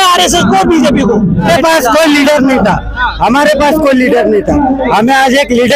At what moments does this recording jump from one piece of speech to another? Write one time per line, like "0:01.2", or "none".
0:01.5